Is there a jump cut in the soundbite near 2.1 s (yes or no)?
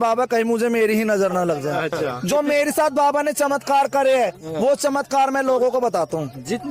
yes